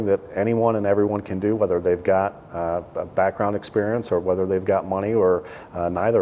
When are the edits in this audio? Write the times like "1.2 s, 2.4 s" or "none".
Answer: none